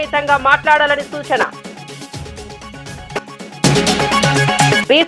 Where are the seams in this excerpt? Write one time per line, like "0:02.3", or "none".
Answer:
0:03.6